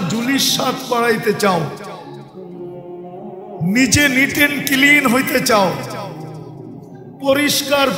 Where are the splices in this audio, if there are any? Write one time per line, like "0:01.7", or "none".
0:01.7
0:03.2

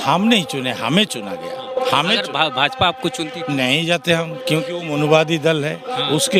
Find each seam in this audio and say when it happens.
none

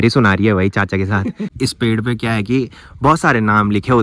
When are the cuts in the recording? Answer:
0:01.5

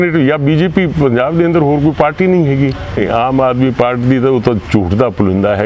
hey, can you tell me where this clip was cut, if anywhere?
0:03.0

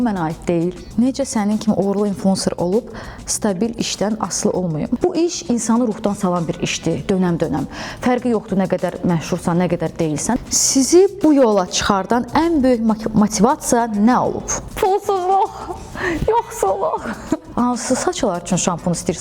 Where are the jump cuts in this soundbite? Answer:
0:00.8
0:05.0
0:10.4
0:17.5

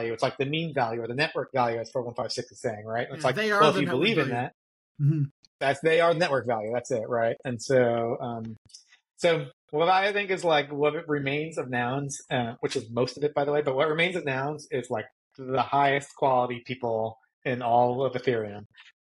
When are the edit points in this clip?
0:05.5

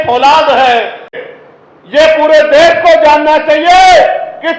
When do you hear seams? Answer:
0:01.2

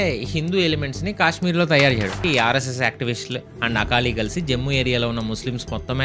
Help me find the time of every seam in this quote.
0:02.2

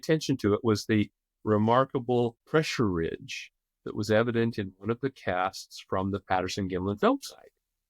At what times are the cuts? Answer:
0:02.4

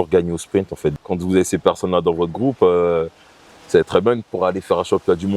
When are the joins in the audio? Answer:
0:00.9

